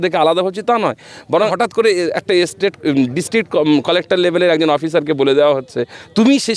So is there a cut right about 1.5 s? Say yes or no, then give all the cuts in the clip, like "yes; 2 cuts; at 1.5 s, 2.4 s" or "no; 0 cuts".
yes; 1 cut; at 1.5 s